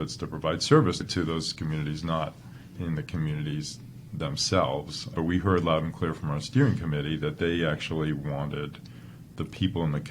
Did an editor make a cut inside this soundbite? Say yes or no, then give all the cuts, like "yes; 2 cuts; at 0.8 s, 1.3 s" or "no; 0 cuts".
yes; 2 cuts; at 2.8 s, 5.1 s